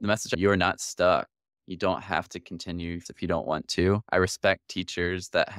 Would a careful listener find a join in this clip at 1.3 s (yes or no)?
no